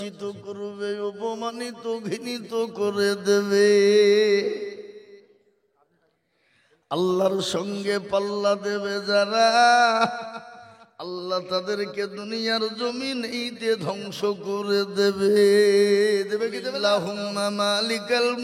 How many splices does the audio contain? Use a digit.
1